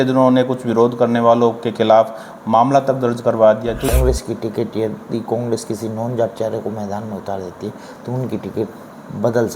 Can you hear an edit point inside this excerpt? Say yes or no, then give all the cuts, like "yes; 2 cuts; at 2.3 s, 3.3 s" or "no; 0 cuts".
yes; 1 cut; at 3.9 s